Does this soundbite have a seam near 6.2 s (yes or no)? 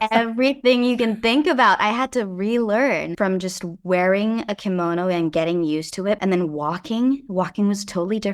yes